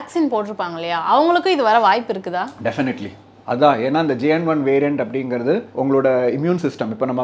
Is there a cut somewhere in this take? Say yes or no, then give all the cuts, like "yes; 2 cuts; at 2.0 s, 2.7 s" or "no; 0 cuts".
no; 0 cuts